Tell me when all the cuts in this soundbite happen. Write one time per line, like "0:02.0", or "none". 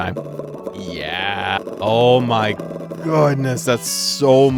none

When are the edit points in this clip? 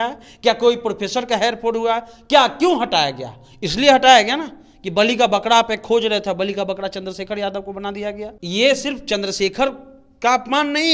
0:08.3

